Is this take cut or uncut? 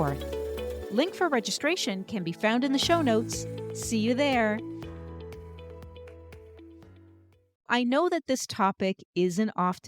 cut